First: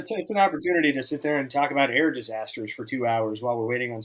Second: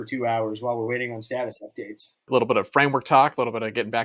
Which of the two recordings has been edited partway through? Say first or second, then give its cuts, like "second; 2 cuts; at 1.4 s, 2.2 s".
second; 1 cut; at 2.3 s